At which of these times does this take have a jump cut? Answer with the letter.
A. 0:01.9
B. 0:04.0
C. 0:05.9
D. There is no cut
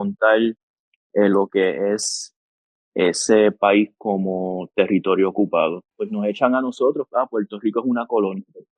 C